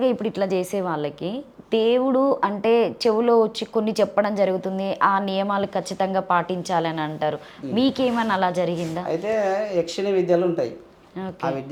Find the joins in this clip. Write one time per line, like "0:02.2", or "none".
none